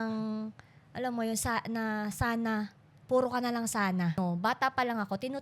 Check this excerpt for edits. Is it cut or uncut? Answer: cut